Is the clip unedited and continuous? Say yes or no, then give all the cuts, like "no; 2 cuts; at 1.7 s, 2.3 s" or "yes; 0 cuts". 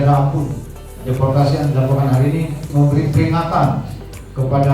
no; 2 cuts; at 0.9 s, 2.6 s